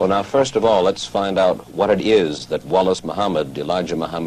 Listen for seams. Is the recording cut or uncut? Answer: cut